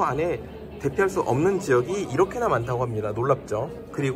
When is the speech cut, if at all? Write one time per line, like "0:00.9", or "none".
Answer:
none